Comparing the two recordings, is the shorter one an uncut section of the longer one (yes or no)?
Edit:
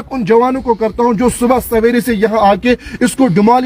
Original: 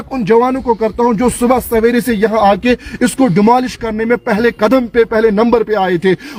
yes